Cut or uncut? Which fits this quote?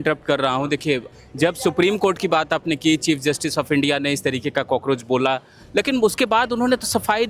cut